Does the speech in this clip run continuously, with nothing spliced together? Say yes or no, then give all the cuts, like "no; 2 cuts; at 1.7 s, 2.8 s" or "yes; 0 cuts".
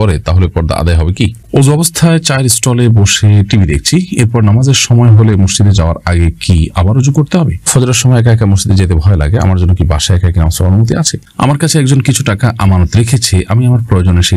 no; 3 cuts; at 1.4 s, 7.7 s, 11.2 s